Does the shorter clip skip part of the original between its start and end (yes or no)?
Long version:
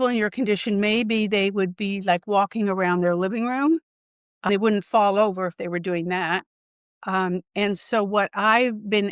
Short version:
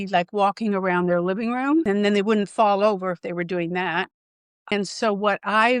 yes